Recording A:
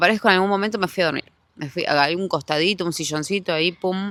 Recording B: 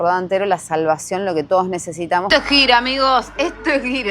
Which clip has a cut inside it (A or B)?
B